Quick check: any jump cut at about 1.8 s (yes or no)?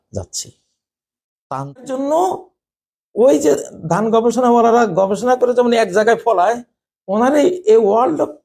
yes